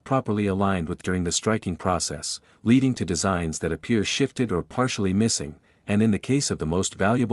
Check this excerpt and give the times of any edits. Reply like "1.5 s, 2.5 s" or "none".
1.0 s

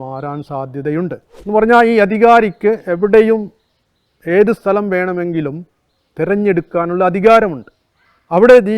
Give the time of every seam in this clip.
1.3 s

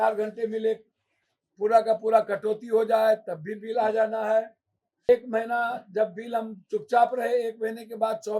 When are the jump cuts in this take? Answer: 5.1 s

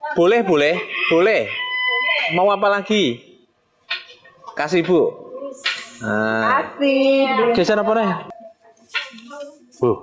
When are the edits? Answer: 8.4 s

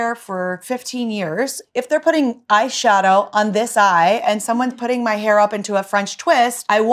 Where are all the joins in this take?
none

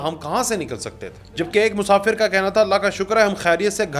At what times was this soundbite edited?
1.4 s

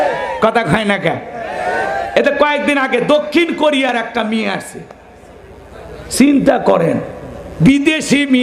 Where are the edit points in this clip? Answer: none

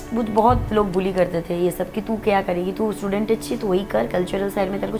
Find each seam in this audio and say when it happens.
none

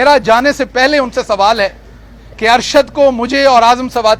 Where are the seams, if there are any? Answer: none

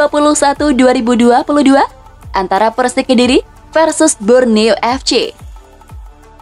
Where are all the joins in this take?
5.4 s

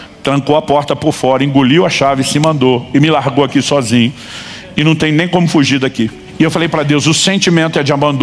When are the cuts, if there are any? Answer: none

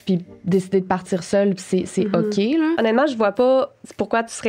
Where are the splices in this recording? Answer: 2.8 s

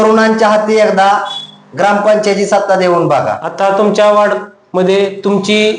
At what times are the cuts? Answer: 3.4 s

